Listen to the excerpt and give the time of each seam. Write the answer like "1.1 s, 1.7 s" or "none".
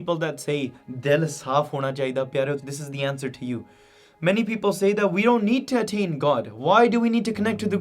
2.6 s

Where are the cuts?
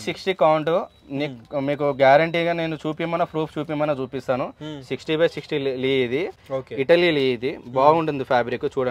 none

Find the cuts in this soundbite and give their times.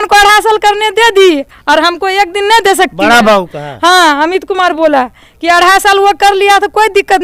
none

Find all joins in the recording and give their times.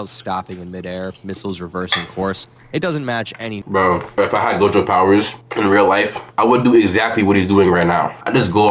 none

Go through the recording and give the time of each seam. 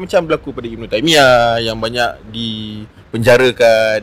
none

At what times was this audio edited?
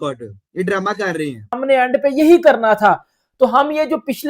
1.6 s

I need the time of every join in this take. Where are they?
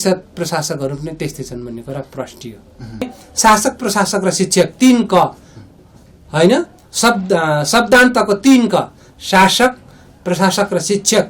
3.2 s

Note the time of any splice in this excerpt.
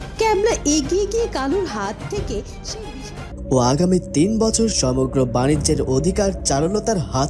3.2 s

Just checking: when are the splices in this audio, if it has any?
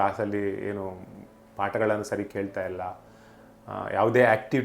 none

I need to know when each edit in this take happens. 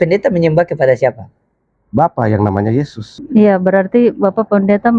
3.0 s

